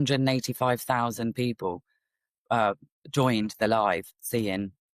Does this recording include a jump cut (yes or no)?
no